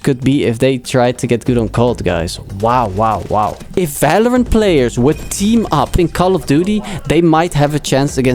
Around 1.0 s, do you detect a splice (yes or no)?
no